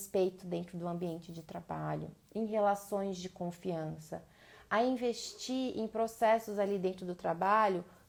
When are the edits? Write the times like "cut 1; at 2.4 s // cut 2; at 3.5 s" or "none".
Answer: none

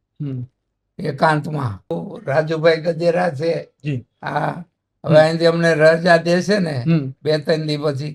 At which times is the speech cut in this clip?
cut 1; at 2.1 s

